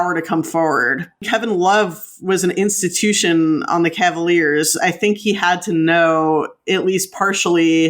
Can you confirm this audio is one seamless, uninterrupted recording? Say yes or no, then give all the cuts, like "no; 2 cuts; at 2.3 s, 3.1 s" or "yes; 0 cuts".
no; 1 cut; at 1.2 s